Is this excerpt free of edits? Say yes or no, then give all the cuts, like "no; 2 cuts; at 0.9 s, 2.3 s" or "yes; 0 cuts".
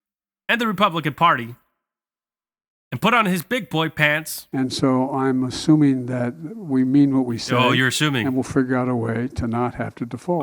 no; 1 cut; at 4.4 s